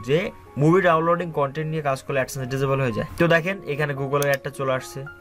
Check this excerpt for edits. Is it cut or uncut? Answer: cut